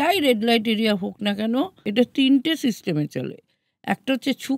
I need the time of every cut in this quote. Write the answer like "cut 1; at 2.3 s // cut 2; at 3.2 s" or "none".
cut 1; at 1.8 s